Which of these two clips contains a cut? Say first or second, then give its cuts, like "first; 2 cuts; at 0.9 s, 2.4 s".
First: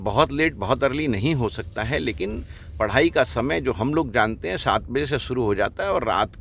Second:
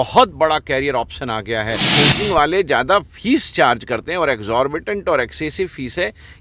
second; 1 cut; at 1.8 s